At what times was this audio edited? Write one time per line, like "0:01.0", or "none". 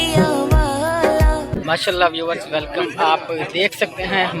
0:01.5